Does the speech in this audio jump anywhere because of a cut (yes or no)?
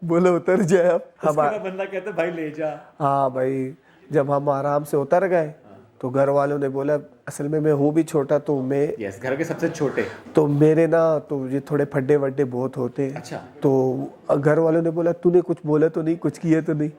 yes